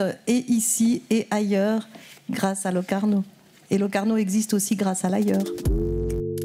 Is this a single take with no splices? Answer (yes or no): no